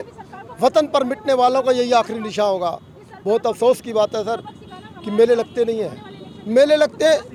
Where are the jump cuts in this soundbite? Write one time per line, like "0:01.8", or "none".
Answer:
none